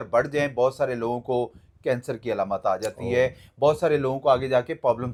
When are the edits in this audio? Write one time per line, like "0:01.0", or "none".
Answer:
none